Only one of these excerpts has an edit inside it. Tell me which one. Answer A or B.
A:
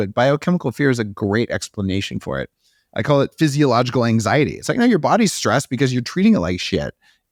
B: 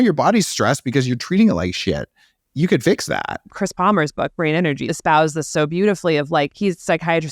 B